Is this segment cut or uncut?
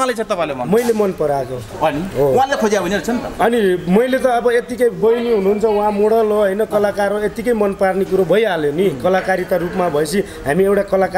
uncut